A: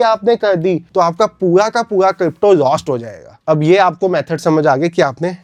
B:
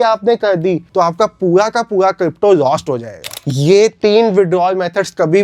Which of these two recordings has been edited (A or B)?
B